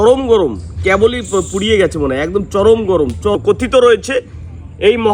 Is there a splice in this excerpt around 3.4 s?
yes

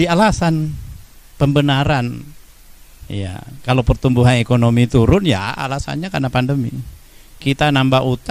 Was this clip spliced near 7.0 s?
no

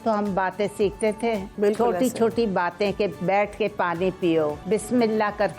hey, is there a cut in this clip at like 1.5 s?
yes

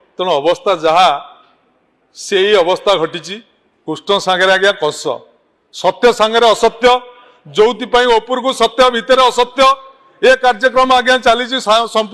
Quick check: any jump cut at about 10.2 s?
no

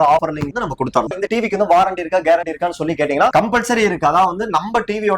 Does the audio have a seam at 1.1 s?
yes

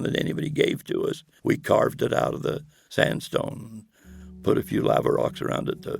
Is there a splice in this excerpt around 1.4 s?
yes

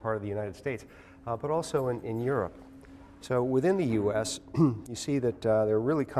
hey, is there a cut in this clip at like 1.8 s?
yes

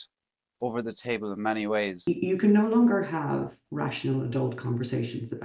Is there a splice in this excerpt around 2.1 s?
yes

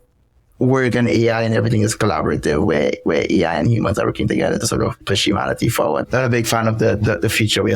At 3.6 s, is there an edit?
no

